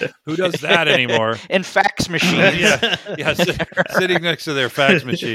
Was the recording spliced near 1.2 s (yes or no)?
no